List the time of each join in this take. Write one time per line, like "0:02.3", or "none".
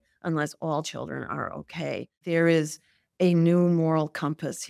0:02.2